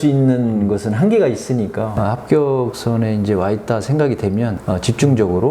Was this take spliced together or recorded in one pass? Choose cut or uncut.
cut